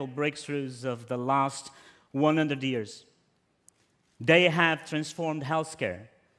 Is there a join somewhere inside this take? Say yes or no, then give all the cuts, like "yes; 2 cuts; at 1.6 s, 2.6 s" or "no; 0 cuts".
yes; 1 cut; at 4.4 s